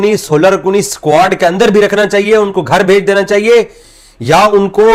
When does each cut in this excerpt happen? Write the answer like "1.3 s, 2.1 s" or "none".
none